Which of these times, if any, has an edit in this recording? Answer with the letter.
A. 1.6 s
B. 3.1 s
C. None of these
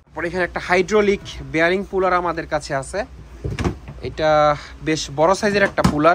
C